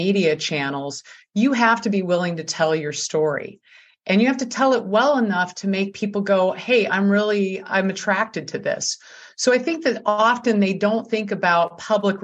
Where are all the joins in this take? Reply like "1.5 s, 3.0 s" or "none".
none